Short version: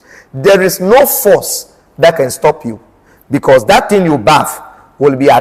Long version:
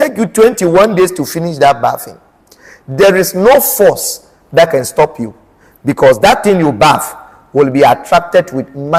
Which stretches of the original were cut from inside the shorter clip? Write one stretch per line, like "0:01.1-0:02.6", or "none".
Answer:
none